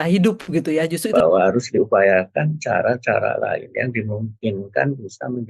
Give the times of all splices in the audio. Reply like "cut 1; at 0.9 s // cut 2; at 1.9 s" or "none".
cut 1; at 1.0 s